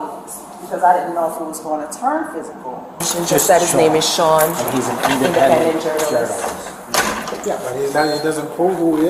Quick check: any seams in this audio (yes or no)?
yes